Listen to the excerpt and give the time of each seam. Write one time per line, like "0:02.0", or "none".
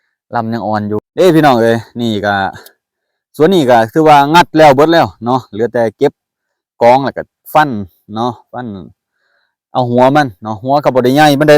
0:01.0